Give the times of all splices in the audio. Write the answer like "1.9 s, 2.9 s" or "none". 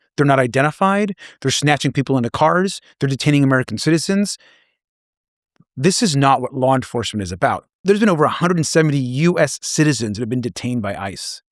7.8 s